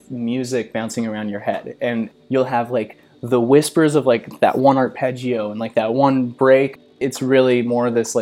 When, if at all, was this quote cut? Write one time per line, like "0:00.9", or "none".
0:02.1
0:06.9